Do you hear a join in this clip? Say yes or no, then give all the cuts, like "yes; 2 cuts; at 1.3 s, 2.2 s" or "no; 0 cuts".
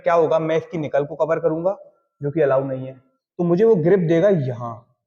no; 0 cuts